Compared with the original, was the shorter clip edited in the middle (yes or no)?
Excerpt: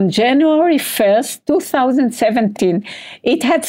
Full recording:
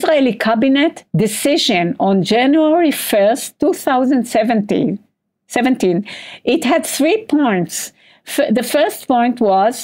yes